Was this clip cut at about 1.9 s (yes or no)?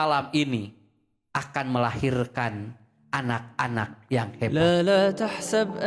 no